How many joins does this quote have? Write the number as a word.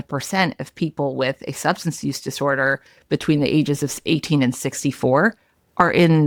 zero